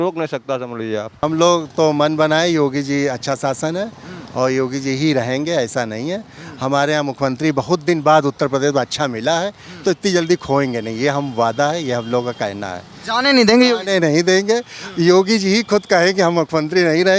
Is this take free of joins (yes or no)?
no